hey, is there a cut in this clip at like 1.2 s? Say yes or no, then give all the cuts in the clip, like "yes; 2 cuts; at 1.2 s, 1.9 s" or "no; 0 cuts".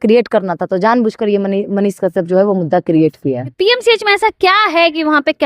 no; 1 cut; at 3.5 s